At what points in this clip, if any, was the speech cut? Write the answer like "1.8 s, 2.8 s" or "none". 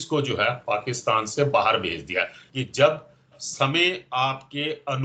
2.4 s